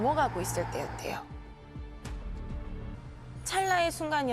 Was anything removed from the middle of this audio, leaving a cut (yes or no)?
yes